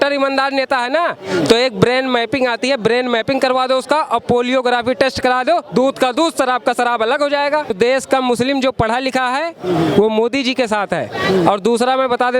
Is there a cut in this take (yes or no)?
yes